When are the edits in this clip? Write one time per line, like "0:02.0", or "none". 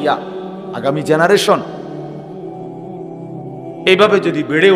0:01.6
0:03.8